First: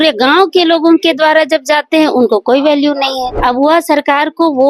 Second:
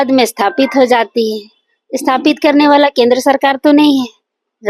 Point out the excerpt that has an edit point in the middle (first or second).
first